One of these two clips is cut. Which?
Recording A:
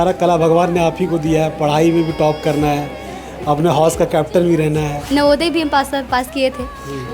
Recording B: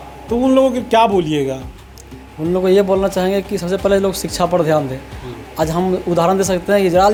A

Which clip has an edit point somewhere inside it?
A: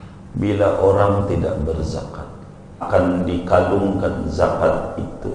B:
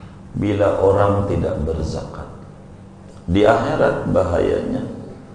A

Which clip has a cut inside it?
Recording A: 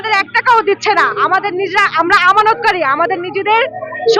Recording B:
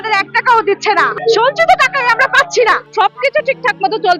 B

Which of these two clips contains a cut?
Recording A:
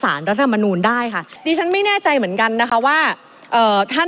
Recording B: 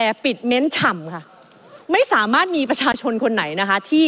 A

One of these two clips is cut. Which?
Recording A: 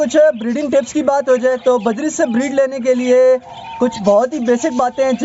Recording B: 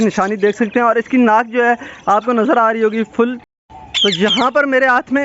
B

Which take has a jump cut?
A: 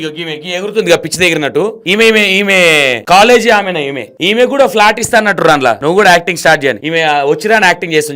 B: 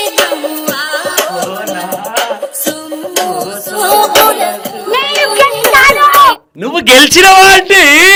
A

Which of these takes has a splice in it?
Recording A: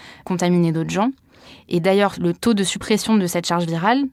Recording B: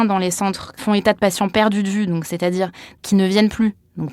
B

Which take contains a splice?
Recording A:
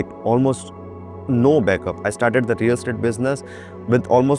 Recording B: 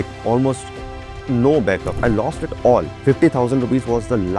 B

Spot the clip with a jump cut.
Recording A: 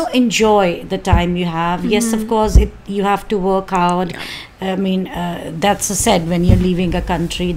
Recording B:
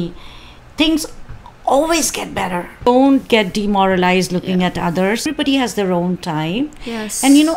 B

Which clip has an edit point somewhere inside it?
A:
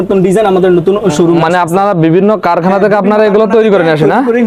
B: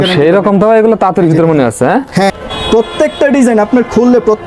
B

